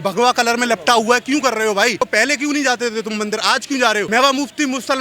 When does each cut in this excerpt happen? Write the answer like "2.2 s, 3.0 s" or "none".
2.0 s, 4.1 s